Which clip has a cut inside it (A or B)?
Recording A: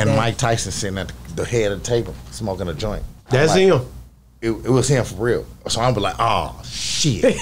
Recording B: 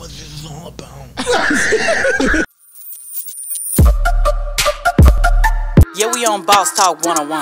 B